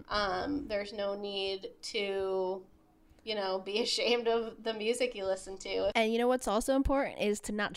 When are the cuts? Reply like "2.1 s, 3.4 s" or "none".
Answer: 5.9 s